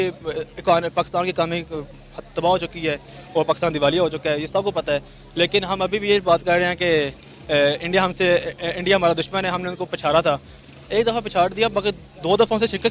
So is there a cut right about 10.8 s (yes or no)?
no